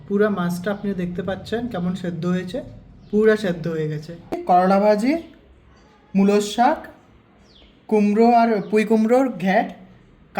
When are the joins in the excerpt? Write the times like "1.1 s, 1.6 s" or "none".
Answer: 4.4 s